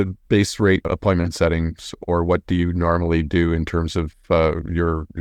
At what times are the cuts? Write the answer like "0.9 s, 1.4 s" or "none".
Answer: 0.9 s